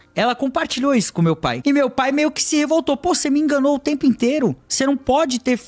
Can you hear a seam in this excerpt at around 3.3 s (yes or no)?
no